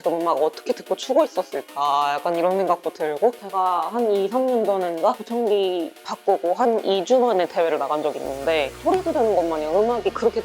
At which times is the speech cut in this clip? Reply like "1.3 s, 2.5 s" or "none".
3.4 s, 8.8 s